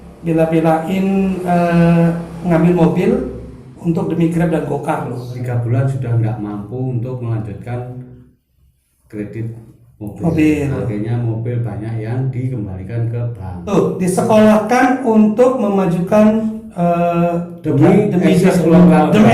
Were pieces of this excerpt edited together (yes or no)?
yes